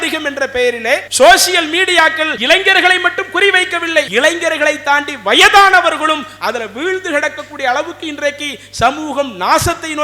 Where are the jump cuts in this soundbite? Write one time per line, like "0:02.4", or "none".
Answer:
0:01.1
0:02.3
0:04.1